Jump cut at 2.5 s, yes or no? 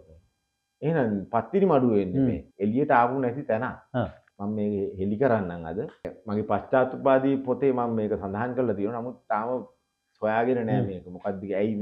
yes